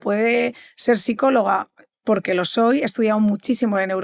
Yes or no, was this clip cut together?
no